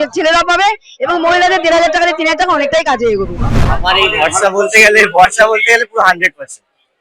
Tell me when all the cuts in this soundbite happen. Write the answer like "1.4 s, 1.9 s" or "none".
3.4 s